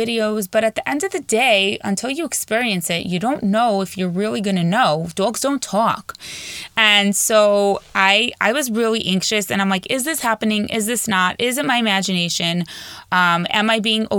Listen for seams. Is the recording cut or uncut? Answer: uncut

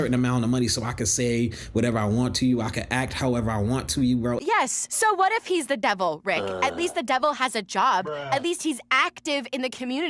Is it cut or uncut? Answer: uncut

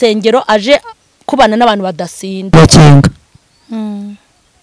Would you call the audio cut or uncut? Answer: cut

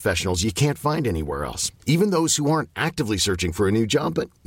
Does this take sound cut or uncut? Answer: uncut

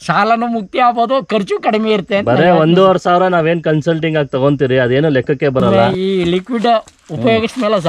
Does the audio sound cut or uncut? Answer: cut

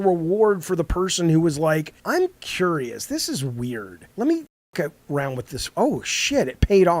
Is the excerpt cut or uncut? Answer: cut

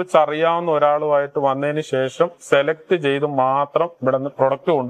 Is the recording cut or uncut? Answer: uncut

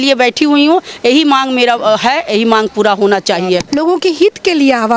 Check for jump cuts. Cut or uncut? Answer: cut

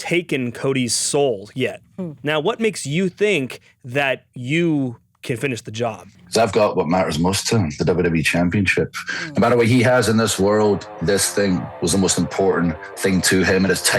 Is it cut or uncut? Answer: cut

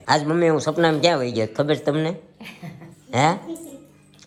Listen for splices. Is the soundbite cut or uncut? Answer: uncut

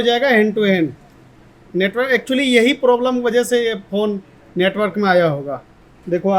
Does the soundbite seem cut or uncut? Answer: uncut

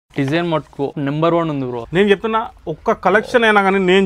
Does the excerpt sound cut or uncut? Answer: cut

